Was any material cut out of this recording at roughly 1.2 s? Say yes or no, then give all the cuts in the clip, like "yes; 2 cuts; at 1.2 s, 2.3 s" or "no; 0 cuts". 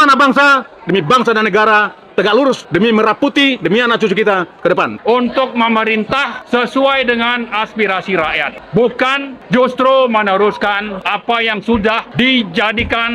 no; 7 cuts; at 2.6 s, 4.9 s, 6.3 s, 8.5 s, 9.3 s, 10.9 s, 12.1 s